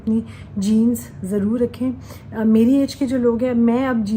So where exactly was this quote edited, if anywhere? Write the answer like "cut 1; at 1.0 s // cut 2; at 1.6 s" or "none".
none